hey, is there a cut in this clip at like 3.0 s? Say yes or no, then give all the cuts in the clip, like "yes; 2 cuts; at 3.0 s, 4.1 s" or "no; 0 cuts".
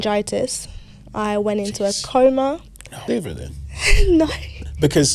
yes; 1 cut; at 3.0 s